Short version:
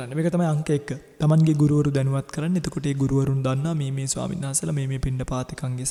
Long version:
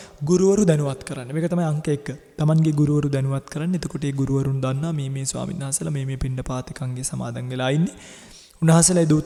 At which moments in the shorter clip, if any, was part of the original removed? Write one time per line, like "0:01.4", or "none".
none